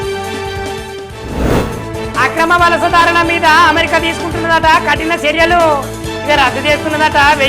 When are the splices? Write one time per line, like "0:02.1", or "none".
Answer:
0:01.3